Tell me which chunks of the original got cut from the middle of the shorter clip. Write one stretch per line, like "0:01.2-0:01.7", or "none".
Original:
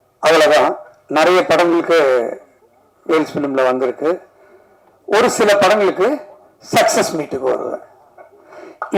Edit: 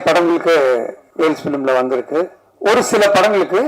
0:02.4-0:02.9
0:04.3-0:04.9